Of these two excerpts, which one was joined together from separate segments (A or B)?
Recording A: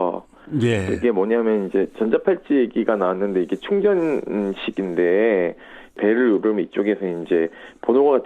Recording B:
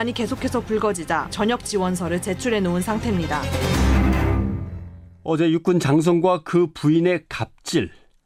A